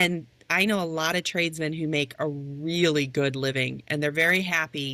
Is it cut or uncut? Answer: uncut